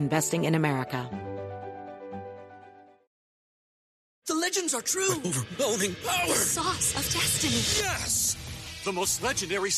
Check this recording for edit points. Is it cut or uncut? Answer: cut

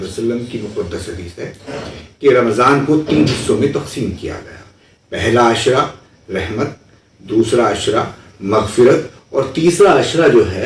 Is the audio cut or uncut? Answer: uncut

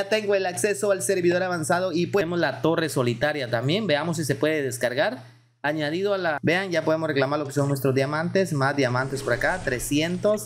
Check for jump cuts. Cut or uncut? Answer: cut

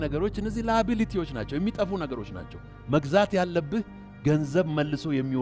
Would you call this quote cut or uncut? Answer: uncut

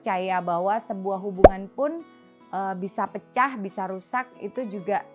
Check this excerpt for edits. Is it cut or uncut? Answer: uncut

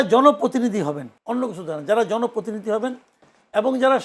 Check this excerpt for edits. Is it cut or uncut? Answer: cut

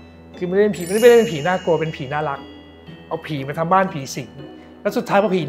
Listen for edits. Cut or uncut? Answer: cut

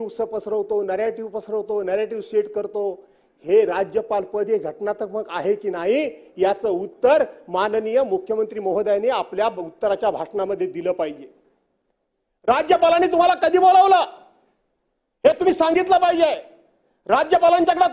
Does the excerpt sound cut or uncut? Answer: uncut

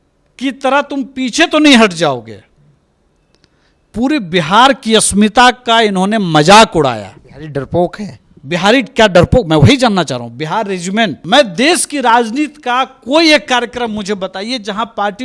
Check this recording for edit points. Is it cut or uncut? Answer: cut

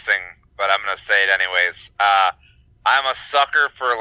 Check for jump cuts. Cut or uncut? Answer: uncut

